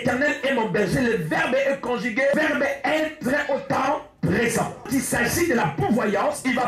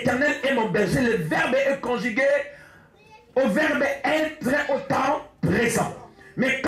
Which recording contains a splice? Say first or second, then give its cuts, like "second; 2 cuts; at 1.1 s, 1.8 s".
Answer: first; 2 cuts; at 2.3 s, 4.9 s